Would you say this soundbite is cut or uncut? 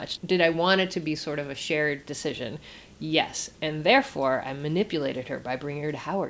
uncut